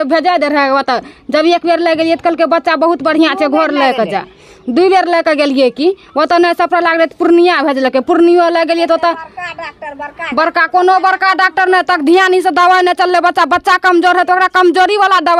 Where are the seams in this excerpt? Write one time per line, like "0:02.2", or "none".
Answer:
none